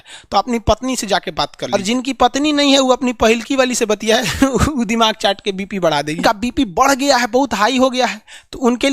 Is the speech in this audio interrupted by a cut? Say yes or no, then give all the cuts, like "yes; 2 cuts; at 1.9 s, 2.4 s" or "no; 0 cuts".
yes; 2 cuts; at 1.7 s, 6.2 s